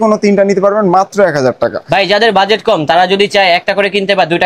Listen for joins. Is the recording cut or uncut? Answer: uncut